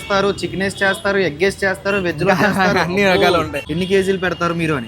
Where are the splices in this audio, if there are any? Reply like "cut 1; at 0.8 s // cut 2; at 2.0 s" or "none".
cut 1; at 3.6 s